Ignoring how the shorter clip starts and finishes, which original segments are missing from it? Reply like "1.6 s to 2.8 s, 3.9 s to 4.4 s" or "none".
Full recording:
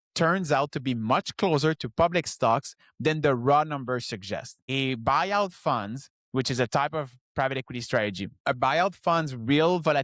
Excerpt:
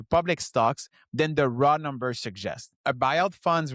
4.5 s to 8.3 s